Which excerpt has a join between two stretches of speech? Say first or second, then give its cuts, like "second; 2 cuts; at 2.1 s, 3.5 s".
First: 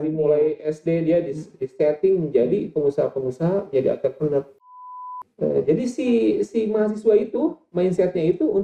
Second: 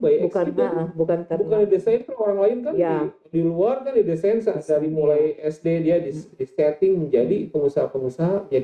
first; 1 cut; at 4.9 s